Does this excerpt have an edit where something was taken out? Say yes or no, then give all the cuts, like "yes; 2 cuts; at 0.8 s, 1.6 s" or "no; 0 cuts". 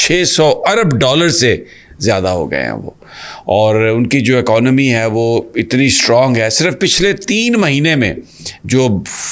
no; 0 cuts